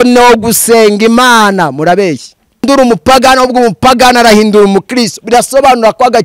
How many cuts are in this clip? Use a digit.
1